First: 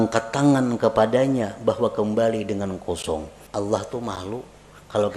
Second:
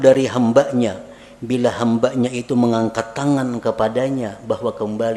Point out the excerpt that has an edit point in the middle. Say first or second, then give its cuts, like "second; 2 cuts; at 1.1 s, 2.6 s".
first; 1 cut; at 3.4 s